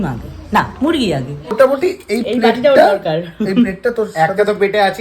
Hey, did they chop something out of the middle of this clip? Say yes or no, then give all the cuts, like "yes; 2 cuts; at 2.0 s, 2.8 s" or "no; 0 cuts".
yes; 1 cut; at 1.5 s